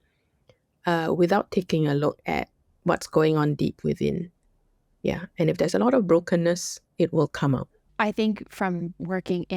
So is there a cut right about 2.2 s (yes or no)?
no